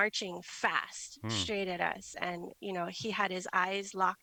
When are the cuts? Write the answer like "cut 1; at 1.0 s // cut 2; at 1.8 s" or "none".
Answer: none